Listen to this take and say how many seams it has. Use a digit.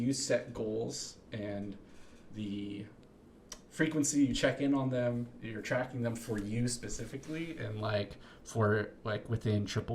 0